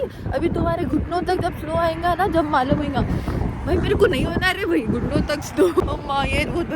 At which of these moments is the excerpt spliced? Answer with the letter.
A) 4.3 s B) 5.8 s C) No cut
B